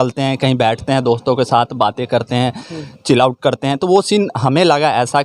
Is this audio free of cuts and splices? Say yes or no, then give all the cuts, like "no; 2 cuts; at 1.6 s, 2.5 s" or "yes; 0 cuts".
yes; 0 cuts